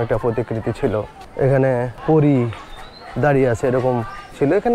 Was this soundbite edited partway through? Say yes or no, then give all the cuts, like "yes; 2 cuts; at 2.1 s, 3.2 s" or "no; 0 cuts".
yes; 2 cuts; at 1.2 s, 2.0 s